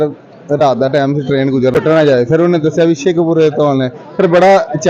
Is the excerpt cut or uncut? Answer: cut